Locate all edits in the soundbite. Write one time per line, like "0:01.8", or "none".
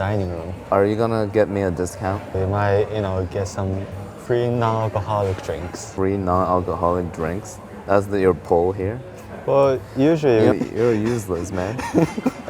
0:00.7
0:02.2
0:04.1
0:05.9
0:10.5

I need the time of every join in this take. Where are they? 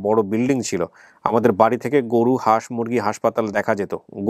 none

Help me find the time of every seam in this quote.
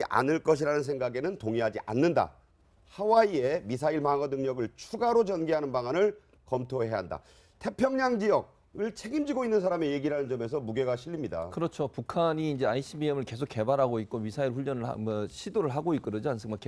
none

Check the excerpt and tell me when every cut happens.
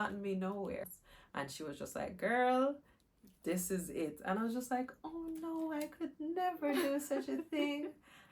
0:00.9

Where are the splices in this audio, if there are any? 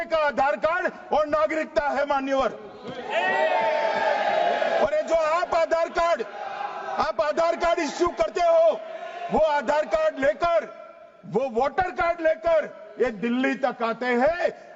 none

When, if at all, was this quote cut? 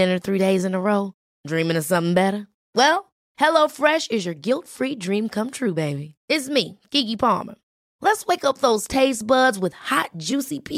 none

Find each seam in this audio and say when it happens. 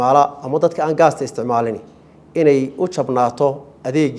none

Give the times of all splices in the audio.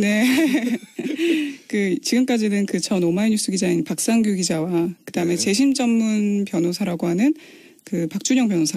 0:07.0

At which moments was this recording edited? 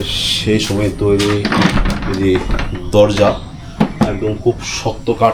none

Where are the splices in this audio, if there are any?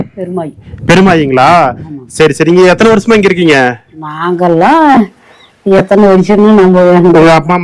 none

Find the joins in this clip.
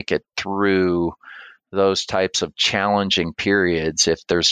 none

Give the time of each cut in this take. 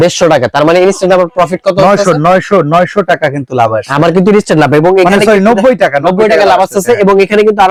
none

